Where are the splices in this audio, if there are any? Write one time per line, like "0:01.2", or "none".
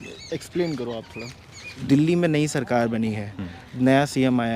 0:01.7